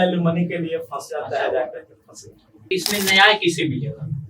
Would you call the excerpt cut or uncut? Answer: cut